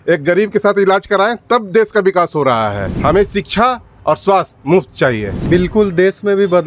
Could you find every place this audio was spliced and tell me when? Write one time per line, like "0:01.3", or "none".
0:02.9
0:05.3